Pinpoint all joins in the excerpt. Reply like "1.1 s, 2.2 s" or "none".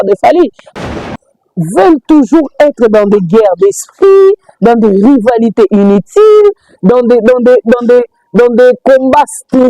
1.1 s

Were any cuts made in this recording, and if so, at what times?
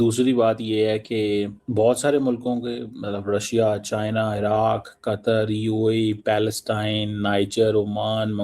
1.6 s

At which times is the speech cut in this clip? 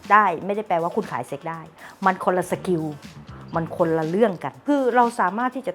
1.7 s, 4.6 s

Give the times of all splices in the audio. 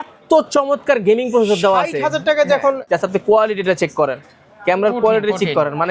2.8 s

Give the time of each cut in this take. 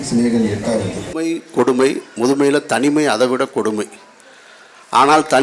1.0 s

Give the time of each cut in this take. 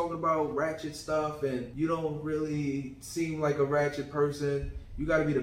1.7 s

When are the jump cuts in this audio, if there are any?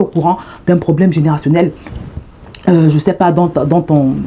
none

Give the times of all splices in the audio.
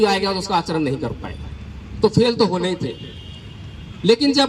none

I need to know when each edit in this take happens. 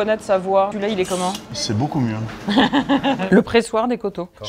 0.9 s, 3.2 s

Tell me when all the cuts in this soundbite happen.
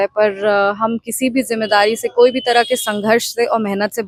none

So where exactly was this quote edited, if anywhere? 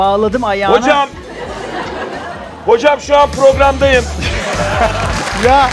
none

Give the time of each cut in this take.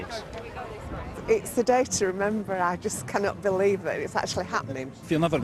none

